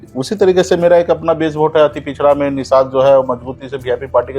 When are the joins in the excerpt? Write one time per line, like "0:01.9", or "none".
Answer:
none

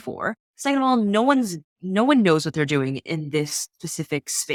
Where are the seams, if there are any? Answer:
none

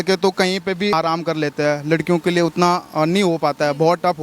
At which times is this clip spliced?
0:00.9

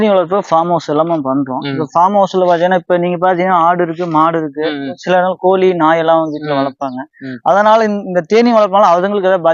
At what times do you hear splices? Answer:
none

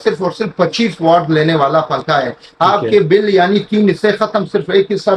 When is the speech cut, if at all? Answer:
none

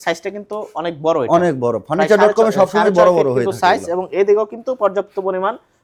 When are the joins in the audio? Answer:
none

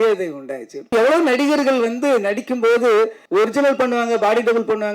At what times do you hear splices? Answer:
0:00.9
0:03.2

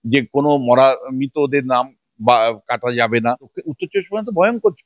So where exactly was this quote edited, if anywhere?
0:03.6

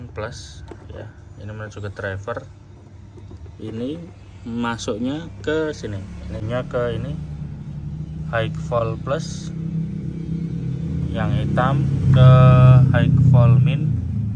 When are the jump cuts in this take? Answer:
0:06.4

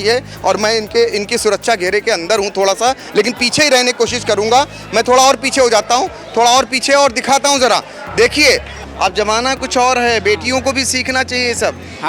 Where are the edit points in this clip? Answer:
0:08.8

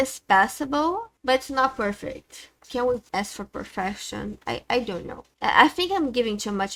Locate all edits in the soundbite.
none

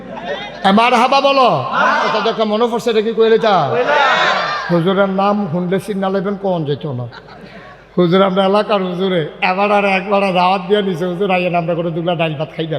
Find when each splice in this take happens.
0:02.1

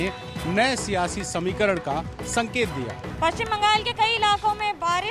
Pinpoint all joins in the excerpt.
0:03.0

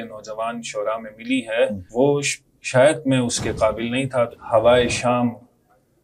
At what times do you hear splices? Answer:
0:01.8
0:04.4

